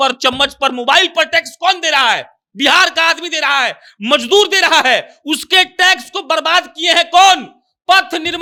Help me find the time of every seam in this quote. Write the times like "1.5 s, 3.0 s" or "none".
none